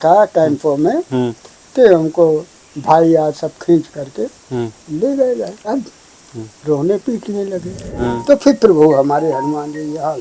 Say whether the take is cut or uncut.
cut